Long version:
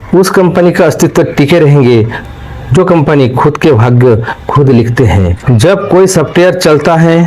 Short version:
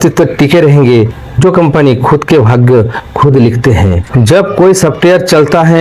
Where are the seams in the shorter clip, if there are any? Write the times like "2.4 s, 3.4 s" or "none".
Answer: 1.2 s